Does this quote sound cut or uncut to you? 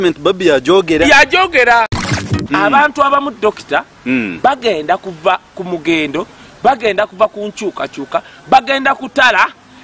cut